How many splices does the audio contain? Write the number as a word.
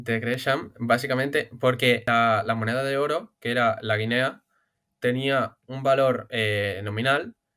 one